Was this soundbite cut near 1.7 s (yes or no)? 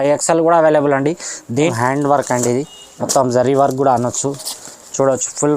yes